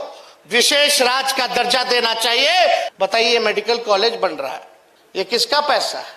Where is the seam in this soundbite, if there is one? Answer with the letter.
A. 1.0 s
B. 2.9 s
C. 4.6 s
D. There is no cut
B